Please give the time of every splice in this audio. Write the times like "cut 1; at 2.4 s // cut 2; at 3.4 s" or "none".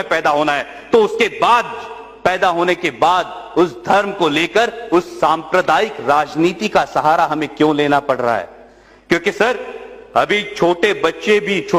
none